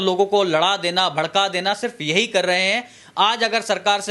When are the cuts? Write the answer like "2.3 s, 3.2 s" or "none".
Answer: none